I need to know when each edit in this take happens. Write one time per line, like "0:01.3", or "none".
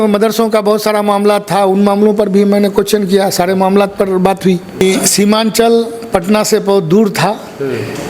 0:04.8